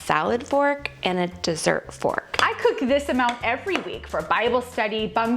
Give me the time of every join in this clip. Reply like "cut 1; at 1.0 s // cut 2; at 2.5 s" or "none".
cut 1; at 2.3 s